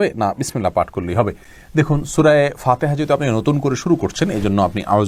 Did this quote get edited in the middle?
no; 0 cuts

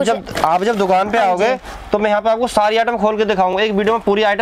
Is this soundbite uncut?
yes; 0 cuts

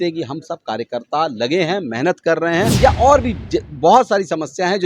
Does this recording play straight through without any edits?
no; 1 cut; at 2.7 s

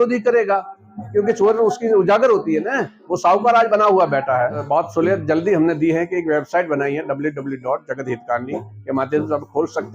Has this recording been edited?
yes; 1 cut; at 4.6 s

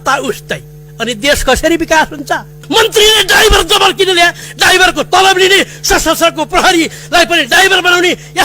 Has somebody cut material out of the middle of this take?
yes; 1 cut; at 2.6 s

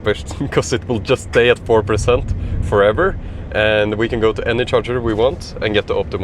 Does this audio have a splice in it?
no; 0 cuts

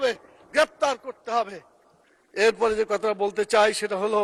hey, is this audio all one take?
yes; 0 cuts

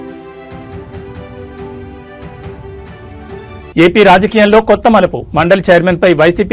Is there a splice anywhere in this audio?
no; 0 cuts

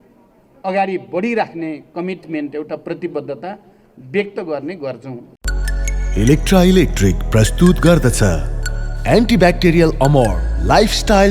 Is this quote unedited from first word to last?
no; 1 cut; at 5.2 s

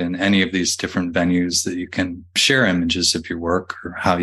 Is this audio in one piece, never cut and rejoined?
no; 1 cut; at 2.4 s

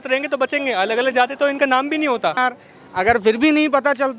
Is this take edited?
yes; 1 cut; at 2.4 s

